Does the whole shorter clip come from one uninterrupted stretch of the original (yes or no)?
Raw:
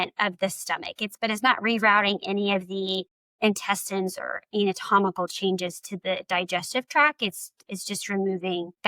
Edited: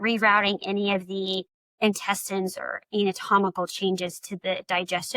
yes